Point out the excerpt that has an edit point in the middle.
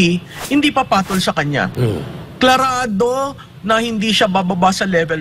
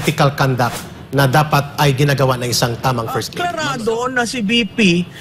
second; 1 cut; at 3.3 s

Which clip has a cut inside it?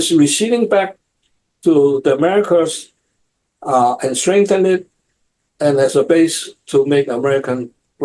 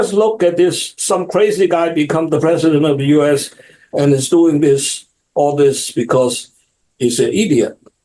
second; 1 cut; at 0.9 s

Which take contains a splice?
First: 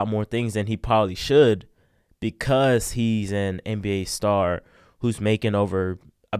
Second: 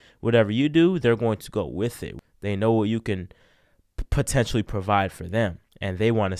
second; 1 cut; at 2.1 s

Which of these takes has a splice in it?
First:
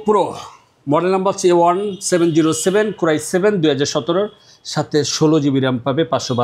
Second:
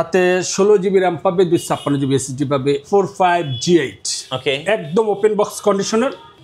second; 1 cut; at 2.8 s

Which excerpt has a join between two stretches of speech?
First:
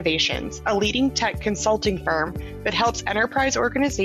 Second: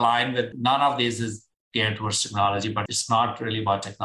second; 1 cut; at 2.8 s

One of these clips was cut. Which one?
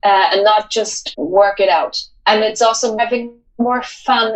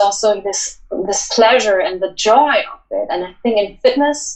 first; 3 cuts; at 1.0 s, 2.1 s, 3.0 s

